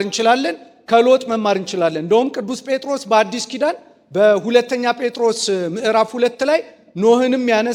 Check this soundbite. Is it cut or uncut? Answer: uncut